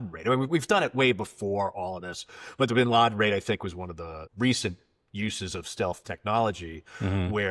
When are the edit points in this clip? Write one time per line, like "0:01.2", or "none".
0:04.2